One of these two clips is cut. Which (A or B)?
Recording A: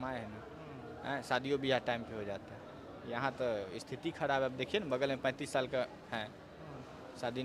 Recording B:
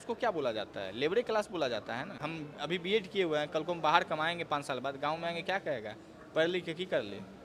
B